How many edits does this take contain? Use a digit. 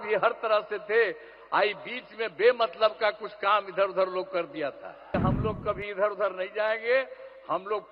1